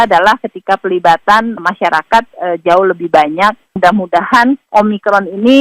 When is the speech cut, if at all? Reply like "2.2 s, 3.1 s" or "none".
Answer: 3.6 s, 4.6 s